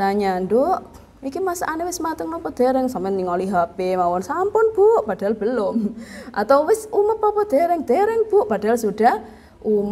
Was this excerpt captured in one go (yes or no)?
yes